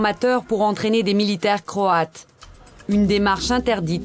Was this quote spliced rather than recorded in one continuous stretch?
no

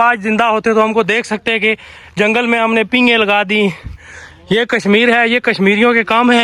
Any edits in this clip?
no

